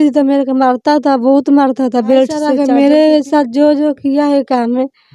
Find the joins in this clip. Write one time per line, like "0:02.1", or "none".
0:02.5